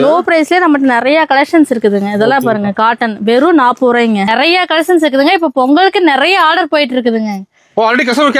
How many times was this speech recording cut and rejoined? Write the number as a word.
one